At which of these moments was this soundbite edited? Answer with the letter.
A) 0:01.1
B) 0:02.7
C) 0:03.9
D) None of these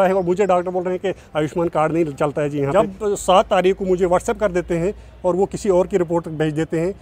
B